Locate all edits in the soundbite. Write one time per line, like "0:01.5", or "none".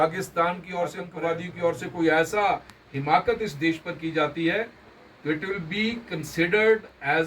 0:01.0